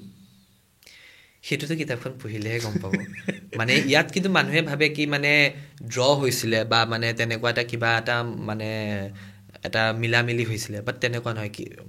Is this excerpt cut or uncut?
uncut